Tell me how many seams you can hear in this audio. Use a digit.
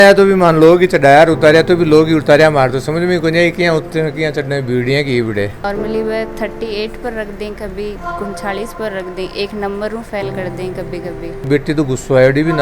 2